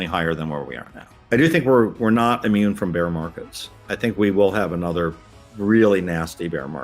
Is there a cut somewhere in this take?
yes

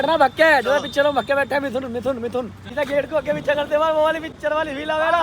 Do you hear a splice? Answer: yes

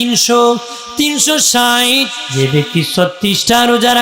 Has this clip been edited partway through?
yes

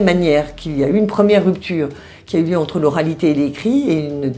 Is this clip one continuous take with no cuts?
yes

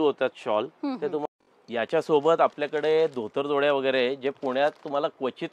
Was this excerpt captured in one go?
no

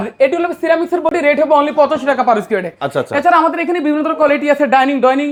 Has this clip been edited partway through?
no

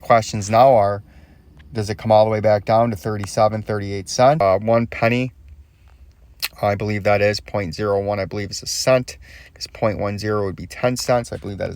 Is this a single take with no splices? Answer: no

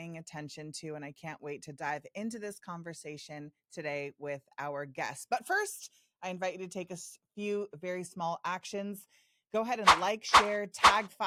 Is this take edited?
no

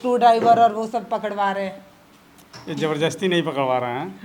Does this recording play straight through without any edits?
yes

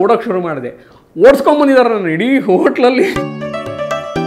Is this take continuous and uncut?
no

